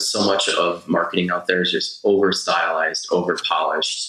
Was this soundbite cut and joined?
no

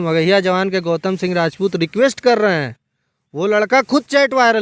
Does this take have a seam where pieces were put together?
no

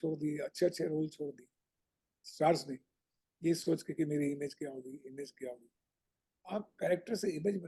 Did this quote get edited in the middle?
no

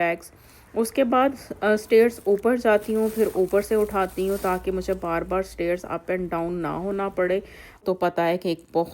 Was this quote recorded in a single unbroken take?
no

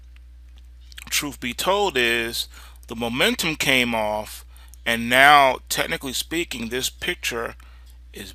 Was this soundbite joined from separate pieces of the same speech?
no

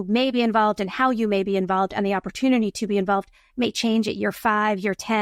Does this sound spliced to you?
no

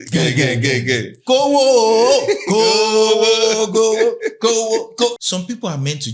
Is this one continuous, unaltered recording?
no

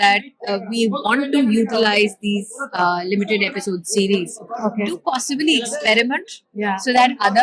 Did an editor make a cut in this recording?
no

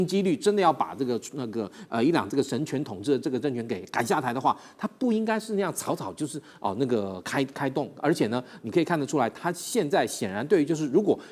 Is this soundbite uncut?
yes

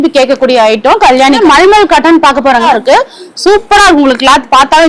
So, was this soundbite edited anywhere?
yes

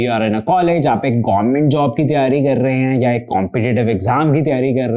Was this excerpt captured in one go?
yes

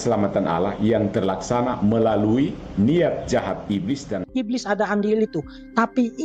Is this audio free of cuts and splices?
no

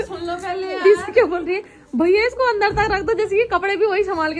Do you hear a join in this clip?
no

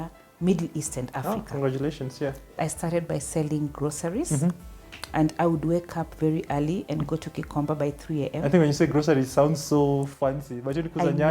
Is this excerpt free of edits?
no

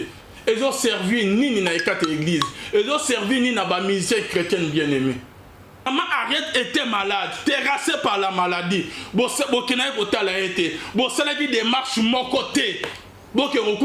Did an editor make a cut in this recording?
yes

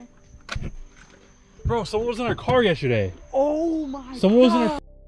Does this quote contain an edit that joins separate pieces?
no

